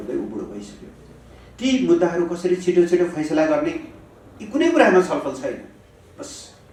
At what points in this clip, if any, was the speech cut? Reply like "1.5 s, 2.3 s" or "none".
none